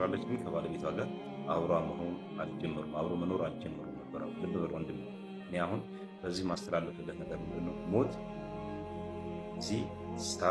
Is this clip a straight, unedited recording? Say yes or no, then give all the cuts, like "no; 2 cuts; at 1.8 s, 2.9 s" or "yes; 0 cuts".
yes; 0 cuts